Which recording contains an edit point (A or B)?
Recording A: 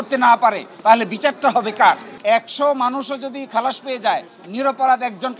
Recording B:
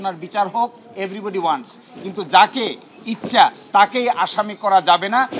A